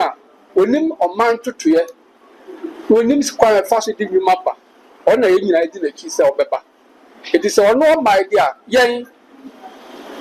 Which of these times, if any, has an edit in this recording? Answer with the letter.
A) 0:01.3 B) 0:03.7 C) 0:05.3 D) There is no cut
D